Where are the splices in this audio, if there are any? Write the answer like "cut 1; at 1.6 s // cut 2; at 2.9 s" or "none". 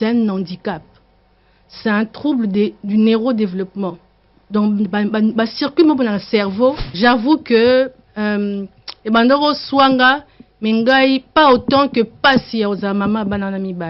cut 1; at 6.9 s

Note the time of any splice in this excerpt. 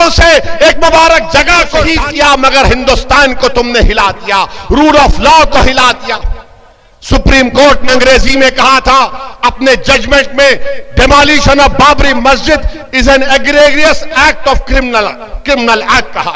cut 1; at 1.9 s

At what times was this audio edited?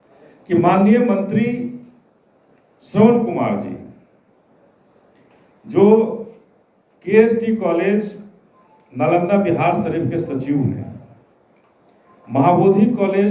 none

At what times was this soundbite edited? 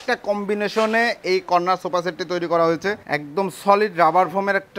cut 1; at 3.0 s

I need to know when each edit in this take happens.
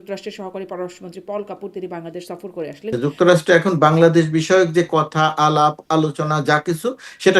cut 1; at 2.9 s

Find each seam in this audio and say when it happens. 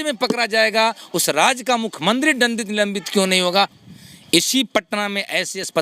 cut 1; at 3.9 s

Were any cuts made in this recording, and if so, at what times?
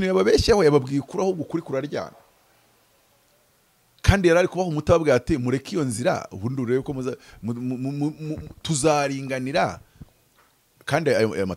none

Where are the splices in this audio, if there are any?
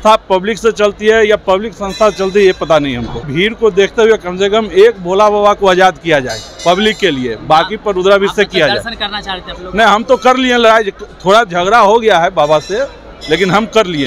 cut 1; at 3.3 s

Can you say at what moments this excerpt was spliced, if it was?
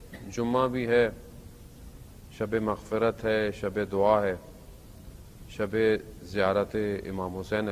none

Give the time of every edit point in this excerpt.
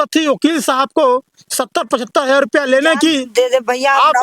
cut 1; at 3.3 s

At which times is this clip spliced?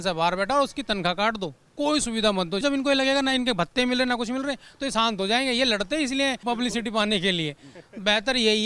cut 1; at 2.6 s // cut 2; at 6.4 s

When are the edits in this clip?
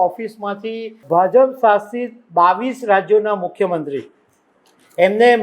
cut 1; at 1.0 s

